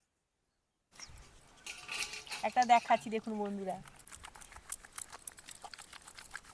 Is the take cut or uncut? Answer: cut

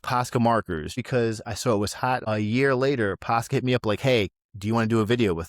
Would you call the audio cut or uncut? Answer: cut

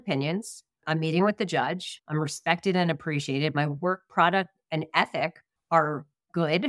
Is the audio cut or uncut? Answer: cut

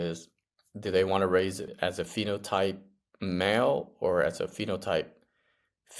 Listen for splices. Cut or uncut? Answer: cut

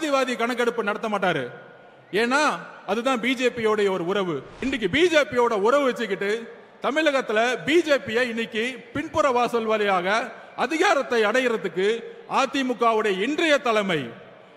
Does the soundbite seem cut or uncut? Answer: cut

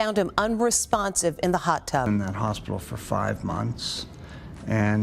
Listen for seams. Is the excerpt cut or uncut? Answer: cut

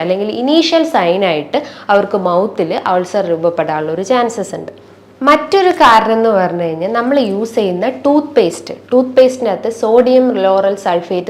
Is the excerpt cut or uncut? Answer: uncut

